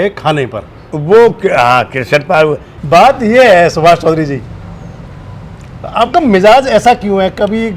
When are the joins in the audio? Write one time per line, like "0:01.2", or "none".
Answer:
0:02.7